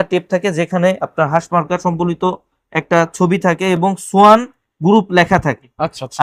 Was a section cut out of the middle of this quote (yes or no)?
no